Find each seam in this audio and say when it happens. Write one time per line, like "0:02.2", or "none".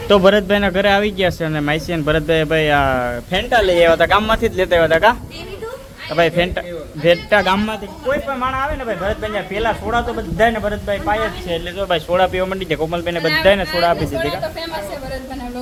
none